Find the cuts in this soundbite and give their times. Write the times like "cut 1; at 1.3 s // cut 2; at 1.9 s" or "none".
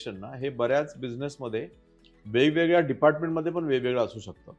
none